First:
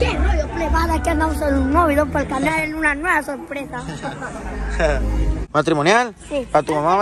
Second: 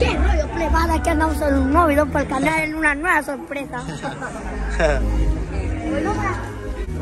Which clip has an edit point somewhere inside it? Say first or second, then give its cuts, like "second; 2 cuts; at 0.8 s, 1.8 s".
first; 1 cut; at 5.4 s